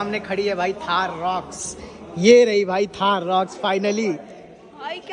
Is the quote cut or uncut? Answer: uncut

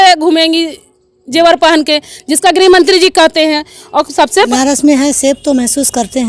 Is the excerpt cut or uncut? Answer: cut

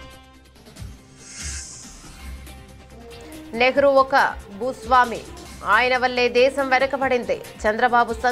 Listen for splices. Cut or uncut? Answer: uncut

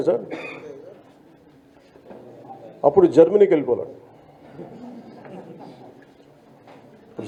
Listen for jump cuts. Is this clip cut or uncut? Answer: uncut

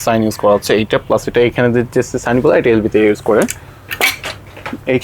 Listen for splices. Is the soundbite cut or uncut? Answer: uncut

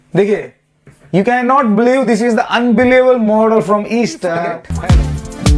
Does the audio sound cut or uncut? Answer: cut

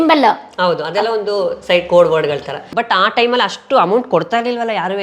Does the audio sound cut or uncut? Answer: cut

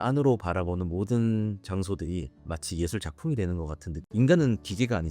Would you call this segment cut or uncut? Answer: cut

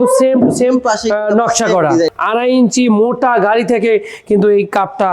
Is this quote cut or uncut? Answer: cut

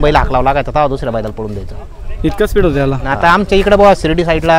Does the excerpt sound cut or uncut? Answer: cut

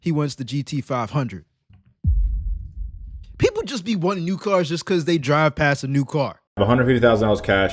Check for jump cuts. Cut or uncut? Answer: cut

